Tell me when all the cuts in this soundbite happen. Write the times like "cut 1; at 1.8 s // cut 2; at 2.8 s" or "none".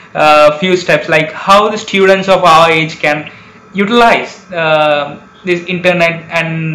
none